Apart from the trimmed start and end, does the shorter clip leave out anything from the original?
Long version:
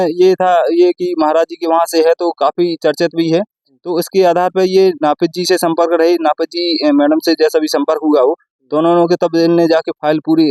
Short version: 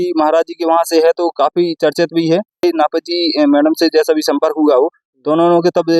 yes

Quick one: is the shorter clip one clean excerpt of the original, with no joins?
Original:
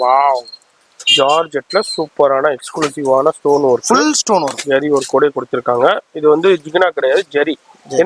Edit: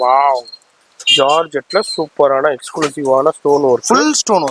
yes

